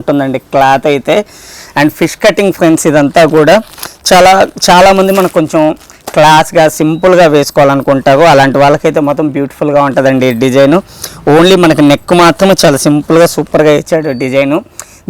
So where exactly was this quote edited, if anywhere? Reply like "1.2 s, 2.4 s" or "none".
none